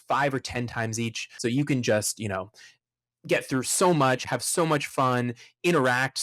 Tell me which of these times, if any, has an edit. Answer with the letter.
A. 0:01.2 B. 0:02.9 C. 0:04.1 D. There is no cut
A